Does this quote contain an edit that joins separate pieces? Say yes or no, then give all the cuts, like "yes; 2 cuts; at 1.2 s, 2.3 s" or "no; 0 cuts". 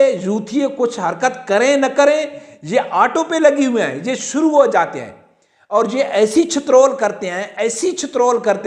no; 0 cuts